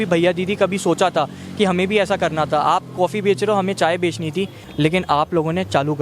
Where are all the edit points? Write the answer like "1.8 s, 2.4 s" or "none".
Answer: 4.6 s